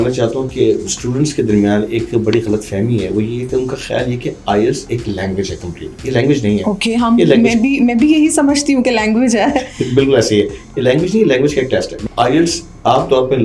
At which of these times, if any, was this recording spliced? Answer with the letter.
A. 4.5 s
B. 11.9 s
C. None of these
B